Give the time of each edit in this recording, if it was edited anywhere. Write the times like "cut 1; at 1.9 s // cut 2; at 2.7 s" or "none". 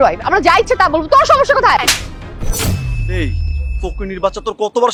none